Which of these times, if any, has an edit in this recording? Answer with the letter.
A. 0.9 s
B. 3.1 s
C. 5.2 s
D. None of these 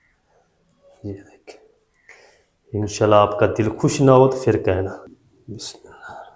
C